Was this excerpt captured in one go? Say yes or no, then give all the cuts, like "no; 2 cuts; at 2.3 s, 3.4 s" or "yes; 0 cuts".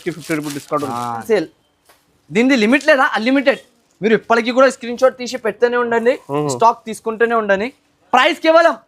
no; 1 cut; at 1.2 s